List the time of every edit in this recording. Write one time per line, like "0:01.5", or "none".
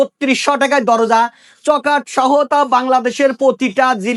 none